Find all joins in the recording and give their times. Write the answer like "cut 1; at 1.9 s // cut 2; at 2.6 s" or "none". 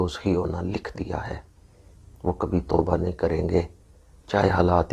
none